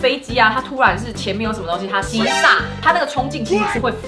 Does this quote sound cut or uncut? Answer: uncut